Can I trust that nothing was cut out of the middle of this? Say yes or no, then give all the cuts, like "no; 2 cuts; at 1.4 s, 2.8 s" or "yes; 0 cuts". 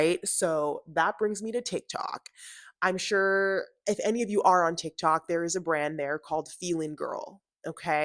yes; 0 cuts